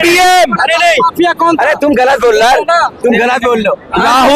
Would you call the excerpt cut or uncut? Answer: uncut